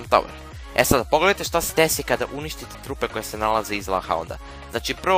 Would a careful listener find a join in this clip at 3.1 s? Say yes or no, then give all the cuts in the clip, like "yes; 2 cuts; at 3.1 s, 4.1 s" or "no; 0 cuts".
no; 1 cut; at 1.4 s